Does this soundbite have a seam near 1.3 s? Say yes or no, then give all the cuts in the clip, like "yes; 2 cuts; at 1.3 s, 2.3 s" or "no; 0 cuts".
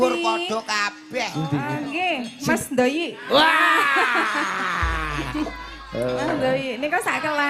yes; 1 cut; at 1.3 s